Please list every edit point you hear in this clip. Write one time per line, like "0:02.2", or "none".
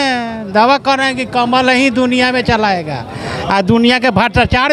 none